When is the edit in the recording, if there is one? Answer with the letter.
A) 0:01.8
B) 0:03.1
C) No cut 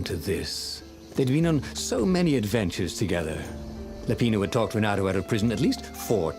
A